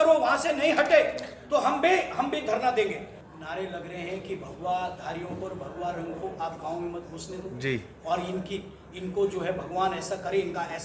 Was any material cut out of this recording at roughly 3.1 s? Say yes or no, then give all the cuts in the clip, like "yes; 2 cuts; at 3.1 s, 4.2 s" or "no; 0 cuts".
yes; 1 cut; at 3.1 s